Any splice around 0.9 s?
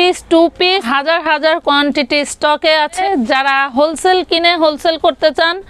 yes; 2 cuts; at 0.9 s, 3.0 s

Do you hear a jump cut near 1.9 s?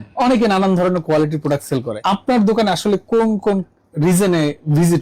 yes; 1 cut; at 1.9 s

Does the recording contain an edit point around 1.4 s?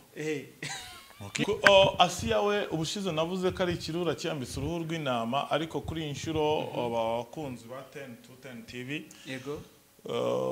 yes; 1 cut; at 1.4 s

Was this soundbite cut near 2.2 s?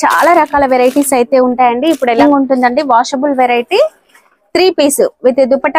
yes; 1 cut; at 2.2 s

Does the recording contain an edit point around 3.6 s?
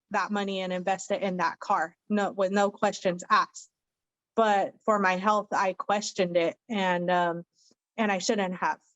no; 0 cuts

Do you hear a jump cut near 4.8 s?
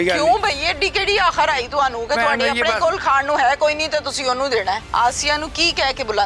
yes; 1 cut; at 4.8 s

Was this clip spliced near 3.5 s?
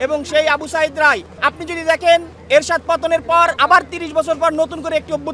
yes; 2 cuts; at 1.3 s, 3.5 s

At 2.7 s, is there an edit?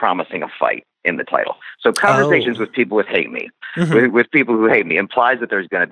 no; 0 cuts

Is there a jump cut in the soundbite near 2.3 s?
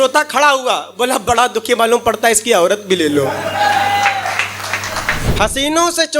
no; 1 cut; at 5.2 s

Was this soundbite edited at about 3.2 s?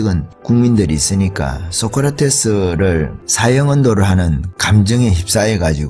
no; 1 cut; at 4.5 s

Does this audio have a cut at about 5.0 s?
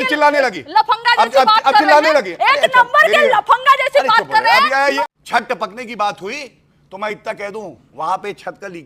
yes; 1 cut; at 5.0 s

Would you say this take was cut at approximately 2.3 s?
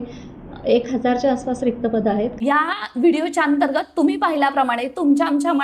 yes; 1 cut; at 2.3 s

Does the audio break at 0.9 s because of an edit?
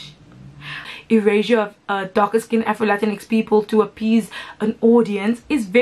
yes; 1 cut; at 0.9 s

